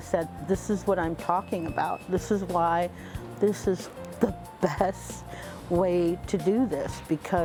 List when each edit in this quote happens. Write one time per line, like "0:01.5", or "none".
none

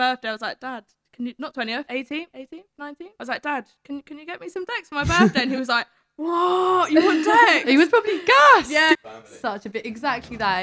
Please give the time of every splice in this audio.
0:08.9

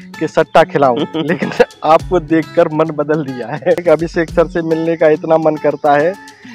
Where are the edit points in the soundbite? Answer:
0:03.8

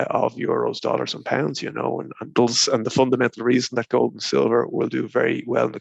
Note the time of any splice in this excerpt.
0:02.3

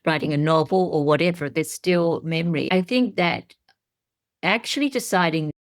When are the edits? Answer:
0:02.7

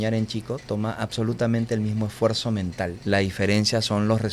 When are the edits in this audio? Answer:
0:03.0

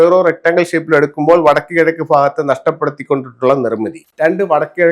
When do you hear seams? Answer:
0:04.0

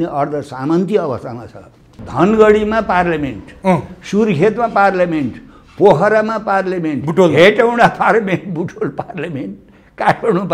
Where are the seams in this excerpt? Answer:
0:01.9

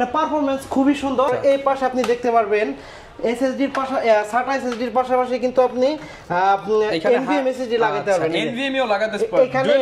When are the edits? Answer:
0:01.3

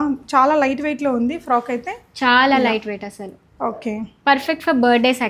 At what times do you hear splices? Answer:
none

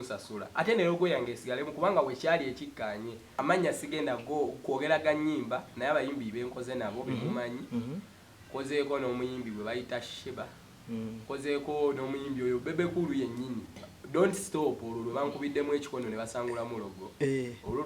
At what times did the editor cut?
0:03.3

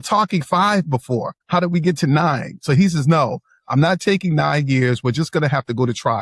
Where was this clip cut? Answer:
0:01.4

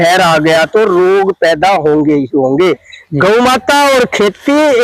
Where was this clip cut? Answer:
0:02.9

